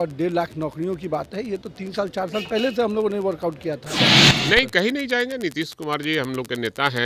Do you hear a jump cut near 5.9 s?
no; 1 cut; at 4.0 s

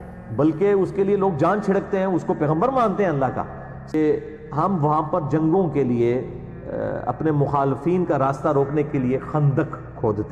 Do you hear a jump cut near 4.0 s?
yes; 1 cut; at 4.0 s

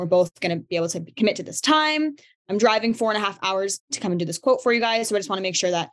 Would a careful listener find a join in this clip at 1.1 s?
no; 2 cuts; at 2.4 s, 3.9 s

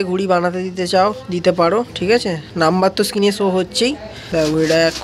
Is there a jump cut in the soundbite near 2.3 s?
no; 1 cut; at 4.1 s

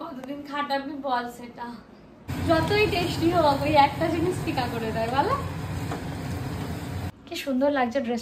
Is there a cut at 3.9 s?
no; 2 cuts; at 2.3 s, 7.1 s

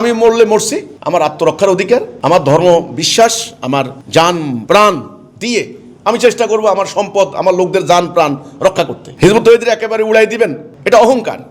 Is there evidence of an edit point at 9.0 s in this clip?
yes; 1 cut; at 9.0 s

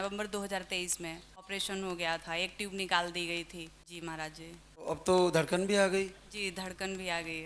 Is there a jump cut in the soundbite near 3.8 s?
yes; 3 cuts; at 1.5 s, 3.8 s, 4.9 s

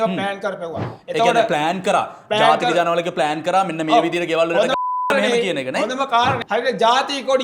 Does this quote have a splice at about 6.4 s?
yes; 1 cut; at 6.4 s

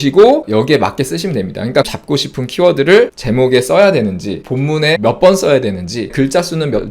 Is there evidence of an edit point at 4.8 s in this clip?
yes; 3 cuts; at 1.9 s, 4.8 s, 6.1 s

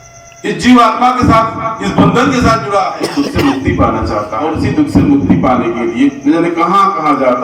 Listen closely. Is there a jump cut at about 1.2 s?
no; 2 cuts; at 3.0 s, 4.4 s

